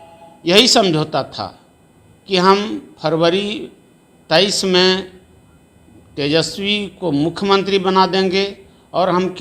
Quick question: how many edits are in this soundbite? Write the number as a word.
zero